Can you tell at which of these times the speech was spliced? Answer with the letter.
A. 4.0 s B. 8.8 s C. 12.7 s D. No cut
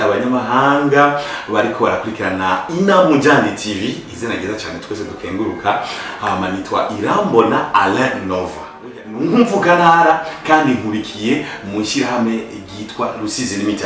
B